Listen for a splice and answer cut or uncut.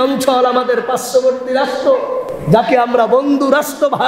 cut